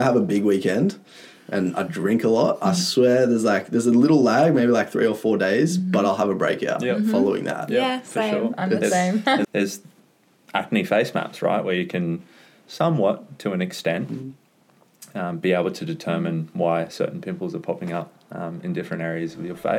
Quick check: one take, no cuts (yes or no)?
no